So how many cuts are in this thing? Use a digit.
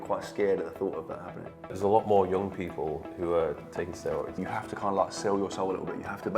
2